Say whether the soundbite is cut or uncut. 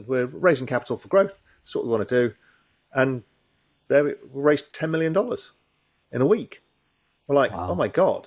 uncut